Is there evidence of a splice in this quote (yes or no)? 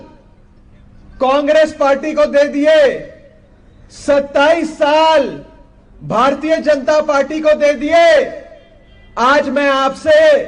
no